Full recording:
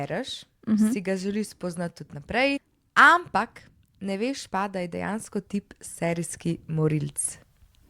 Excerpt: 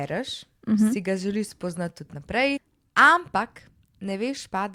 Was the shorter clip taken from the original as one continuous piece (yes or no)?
yes